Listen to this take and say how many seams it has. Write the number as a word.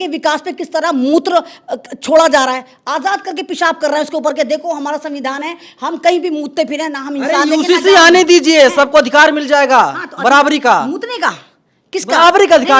zero